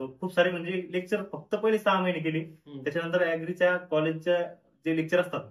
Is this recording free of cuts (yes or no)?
yes